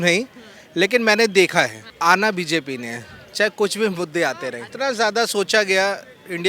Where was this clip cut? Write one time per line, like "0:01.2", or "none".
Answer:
0:01.8
0:04.7